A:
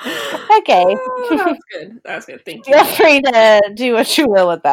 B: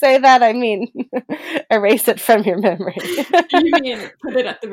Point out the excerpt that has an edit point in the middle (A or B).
B